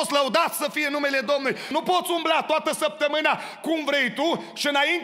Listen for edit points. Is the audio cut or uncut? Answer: cut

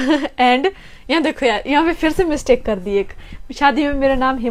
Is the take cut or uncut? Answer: uncut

